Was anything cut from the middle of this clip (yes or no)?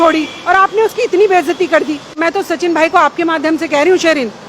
yes